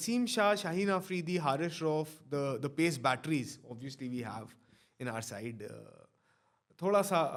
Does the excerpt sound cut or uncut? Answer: uncut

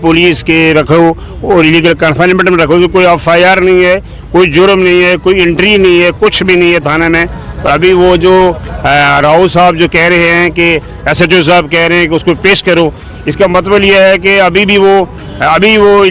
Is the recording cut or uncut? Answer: uncut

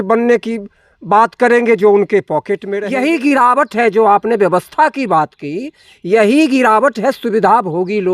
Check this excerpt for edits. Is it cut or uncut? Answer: cut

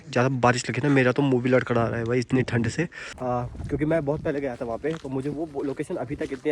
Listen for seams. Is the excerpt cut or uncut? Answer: cut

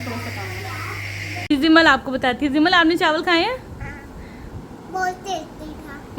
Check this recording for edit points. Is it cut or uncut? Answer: cut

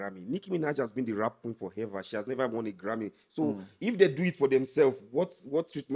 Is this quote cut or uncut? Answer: uncut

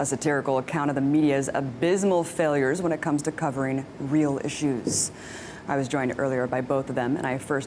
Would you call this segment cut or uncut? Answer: cut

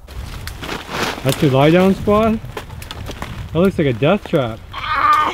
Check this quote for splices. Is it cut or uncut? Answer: uncut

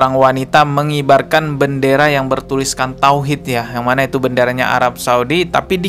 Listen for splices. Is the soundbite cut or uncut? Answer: uncut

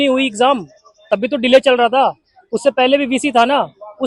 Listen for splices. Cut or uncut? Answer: uncut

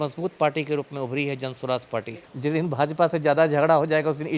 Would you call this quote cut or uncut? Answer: cut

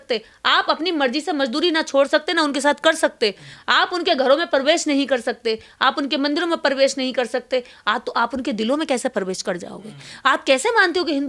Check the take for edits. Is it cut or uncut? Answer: uncut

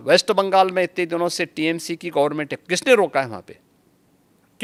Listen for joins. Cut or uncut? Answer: uncut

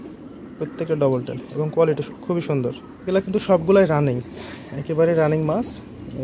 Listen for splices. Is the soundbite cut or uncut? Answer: cut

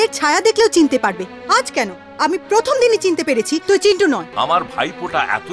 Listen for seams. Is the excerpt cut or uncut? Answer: cut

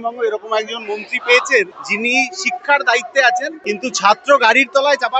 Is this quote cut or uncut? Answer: cut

